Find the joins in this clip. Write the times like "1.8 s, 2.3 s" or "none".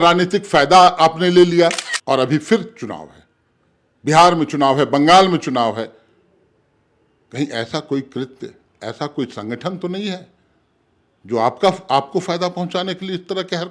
1.9 s